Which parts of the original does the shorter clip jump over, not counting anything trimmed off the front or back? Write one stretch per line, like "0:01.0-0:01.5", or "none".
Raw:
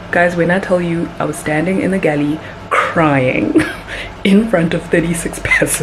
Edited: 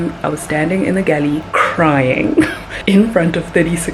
0:02.4-0:02.6
0:03.8-0:04.0